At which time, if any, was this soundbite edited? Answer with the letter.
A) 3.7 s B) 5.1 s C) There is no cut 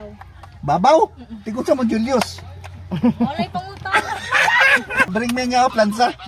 B